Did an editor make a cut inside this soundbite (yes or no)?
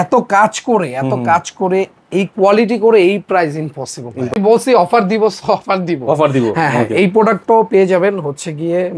yes